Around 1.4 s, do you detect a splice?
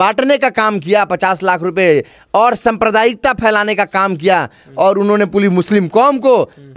no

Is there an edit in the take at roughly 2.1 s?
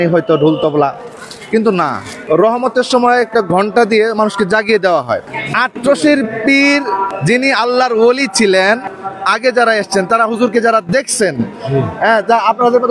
yes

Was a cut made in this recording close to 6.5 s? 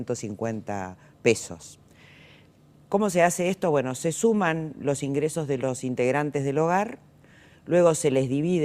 no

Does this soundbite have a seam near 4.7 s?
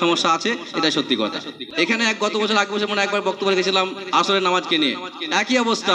no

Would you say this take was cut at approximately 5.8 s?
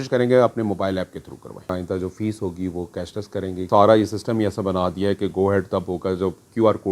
no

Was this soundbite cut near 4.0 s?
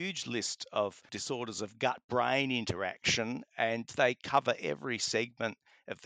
no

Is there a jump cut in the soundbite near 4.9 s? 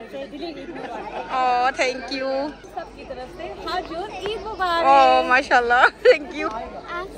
no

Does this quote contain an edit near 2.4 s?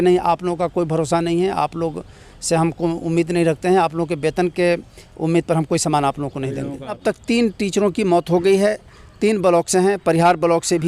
no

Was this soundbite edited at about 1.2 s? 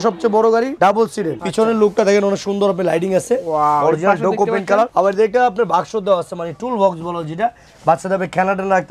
no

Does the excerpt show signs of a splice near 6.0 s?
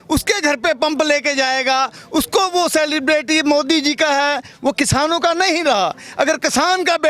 no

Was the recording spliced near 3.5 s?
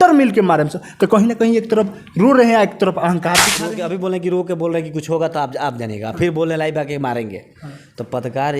yes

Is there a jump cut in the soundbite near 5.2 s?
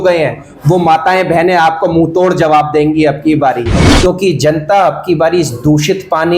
no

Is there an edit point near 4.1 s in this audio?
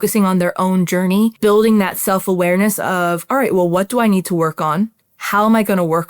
no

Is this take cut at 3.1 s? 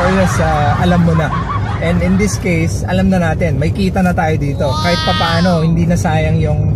no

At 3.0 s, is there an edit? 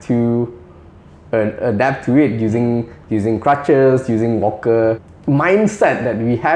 no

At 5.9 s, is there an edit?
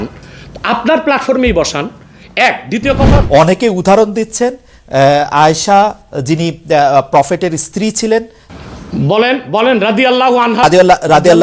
no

